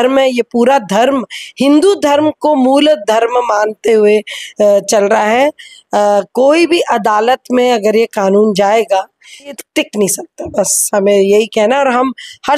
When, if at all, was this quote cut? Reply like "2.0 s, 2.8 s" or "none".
9.6 s